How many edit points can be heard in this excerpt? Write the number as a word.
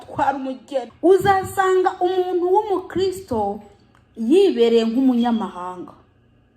one